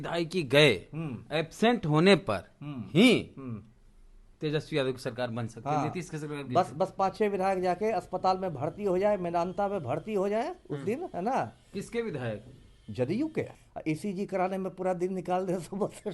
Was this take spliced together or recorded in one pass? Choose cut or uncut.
cut